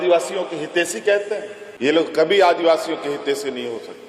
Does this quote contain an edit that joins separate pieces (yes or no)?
yes